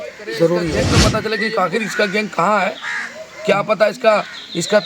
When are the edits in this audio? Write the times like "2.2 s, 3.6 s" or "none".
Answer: 1.0 s